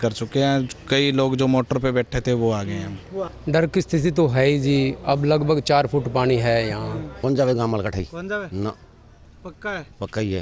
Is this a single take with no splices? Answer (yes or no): no